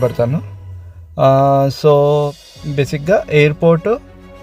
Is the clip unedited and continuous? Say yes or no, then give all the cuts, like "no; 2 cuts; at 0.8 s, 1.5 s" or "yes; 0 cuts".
yes; 0 cuts